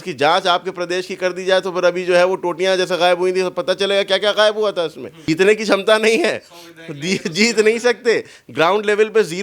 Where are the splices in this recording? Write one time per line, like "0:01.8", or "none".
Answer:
0:05.1